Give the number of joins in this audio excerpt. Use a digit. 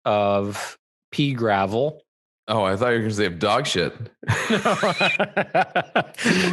0